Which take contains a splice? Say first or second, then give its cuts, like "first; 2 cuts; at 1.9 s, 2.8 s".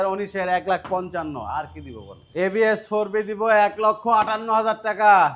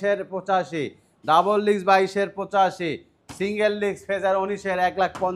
first; 1 cut; at 2.2 s